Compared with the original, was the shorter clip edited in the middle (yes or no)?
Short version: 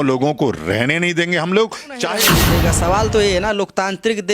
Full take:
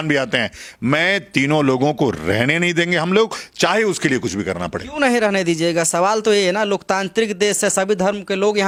yes